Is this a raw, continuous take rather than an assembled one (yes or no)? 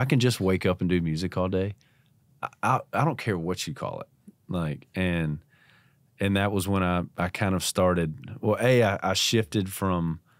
yes